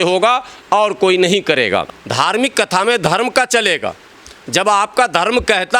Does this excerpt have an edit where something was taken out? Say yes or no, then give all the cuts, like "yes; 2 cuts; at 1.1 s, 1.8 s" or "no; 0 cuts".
yes; 1 cut; at 1.9 s